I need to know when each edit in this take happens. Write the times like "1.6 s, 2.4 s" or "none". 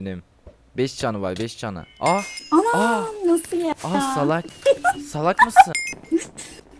2.4 s, 4.5 s, 5.9 s